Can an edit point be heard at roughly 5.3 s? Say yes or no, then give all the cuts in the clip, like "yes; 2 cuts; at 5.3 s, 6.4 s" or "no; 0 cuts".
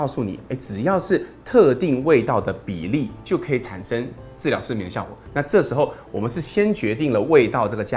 no; 0 cuts